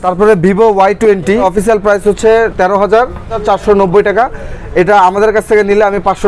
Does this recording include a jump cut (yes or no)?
no